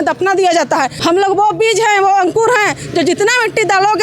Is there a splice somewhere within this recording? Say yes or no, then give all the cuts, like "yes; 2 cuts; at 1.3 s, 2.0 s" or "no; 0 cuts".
yes; 1 cut; at 0.9 s